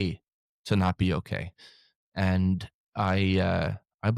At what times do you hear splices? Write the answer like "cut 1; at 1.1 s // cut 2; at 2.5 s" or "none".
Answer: none